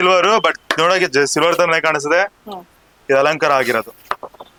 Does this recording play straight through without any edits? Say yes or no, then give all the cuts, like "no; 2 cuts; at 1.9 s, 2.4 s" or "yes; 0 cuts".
yes; 0 cuts